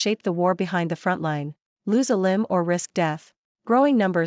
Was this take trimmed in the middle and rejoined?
yes; 1 cut; at 1.8 s

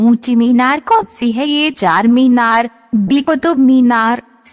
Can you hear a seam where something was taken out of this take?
no; 0 cuts

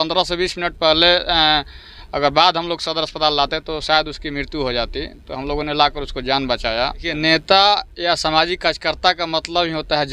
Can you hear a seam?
yes; 1 cut; at 7.2 s

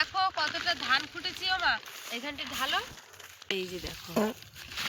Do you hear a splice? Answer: yes; 1 cut; at 3.5 s

